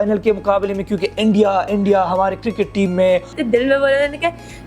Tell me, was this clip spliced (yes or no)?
yes